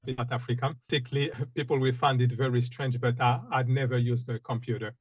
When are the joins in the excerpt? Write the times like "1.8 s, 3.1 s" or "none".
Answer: 1.1 s